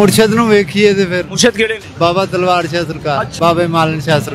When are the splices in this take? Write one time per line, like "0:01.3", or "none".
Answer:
0:01.8
0:03.3